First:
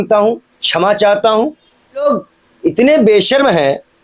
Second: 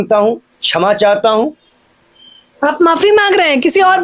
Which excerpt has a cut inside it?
first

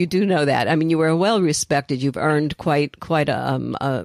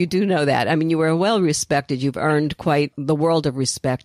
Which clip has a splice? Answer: second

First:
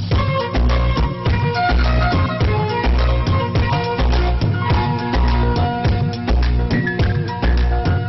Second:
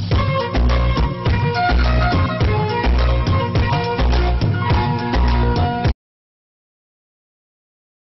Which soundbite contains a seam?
first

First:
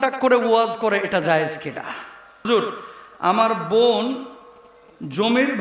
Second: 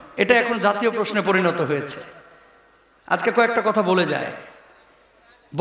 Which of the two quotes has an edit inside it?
first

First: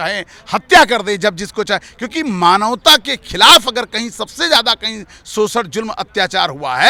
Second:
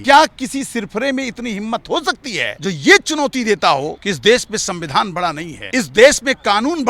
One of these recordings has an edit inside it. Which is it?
second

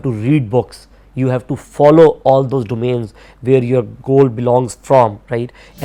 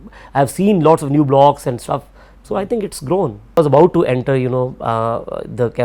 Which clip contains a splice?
second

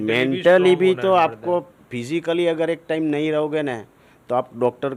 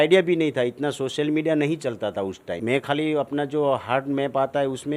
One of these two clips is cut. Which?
second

